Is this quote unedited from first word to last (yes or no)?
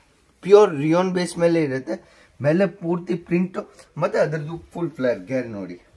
yes